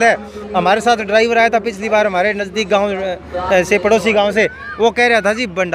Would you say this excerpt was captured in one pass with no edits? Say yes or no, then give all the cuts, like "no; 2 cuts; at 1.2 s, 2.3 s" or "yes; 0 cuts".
yes; 0 cuts